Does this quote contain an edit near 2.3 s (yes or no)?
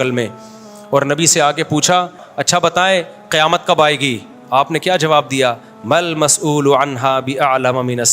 yes